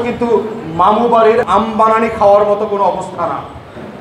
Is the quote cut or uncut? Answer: cut